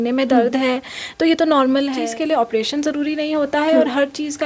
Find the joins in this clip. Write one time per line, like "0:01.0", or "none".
0:02.0